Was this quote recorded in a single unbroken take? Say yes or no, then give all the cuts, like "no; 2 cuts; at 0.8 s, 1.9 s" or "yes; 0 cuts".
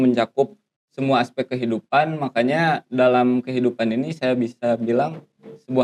yes; 0 cuts